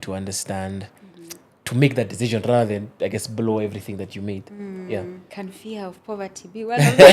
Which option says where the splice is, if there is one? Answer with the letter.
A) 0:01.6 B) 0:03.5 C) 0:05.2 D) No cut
C